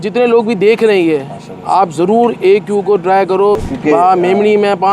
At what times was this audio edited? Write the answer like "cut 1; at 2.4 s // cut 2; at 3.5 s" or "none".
cut 1; at 3.6 s